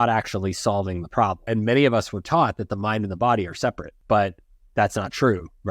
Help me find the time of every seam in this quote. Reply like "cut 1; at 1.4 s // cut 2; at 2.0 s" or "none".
cut 1; at 1.4 s // cut 2; at 3.9 s